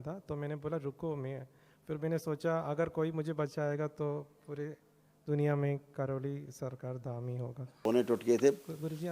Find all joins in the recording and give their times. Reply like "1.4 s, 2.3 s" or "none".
7.7 s